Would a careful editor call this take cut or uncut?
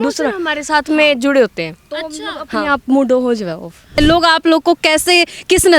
cut